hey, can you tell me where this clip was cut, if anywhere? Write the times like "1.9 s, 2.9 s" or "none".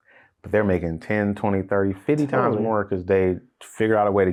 none